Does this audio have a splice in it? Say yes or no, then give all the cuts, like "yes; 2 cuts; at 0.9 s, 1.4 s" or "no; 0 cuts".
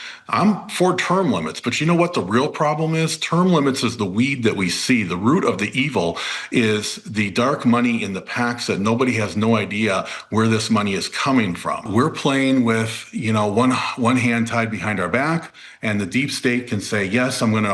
yes; 1 cut; at 11.8 s